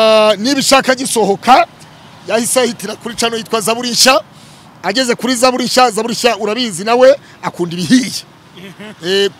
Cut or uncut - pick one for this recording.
uncut